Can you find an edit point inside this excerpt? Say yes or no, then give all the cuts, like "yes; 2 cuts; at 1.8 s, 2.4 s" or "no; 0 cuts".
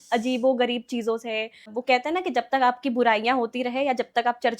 yes; 1 cut; at 1.7 s